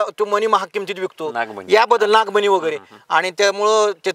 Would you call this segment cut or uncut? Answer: uncut